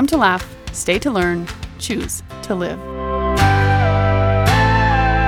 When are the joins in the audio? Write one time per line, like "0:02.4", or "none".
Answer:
none